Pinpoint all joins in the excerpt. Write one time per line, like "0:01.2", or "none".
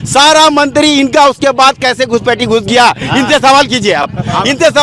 none